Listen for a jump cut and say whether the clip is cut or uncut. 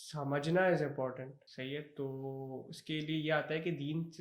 cut